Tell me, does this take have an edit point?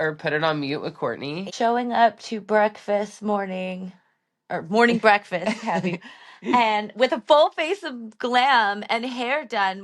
yes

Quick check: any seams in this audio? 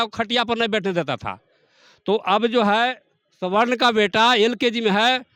no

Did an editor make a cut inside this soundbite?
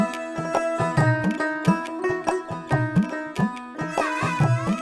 yes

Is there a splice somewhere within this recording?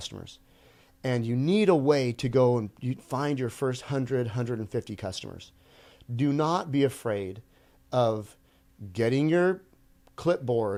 no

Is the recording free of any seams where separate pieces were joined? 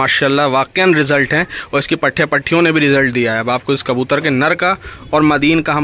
yes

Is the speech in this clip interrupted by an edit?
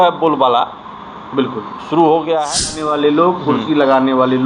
yes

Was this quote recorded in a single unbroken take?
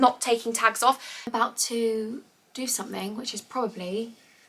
no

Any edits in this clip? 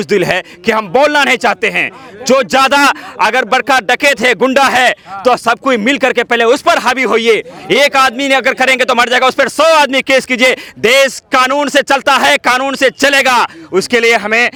no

